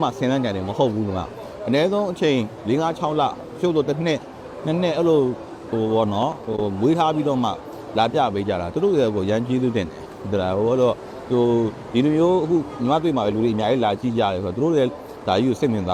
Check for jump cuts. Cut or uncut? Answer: uncut